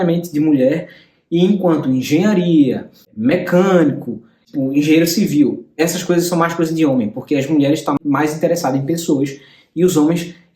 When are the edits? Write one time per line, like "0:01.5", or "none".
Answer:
0:04.4
0:08.0

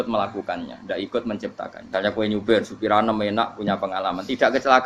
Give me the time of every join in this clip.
0:01.8

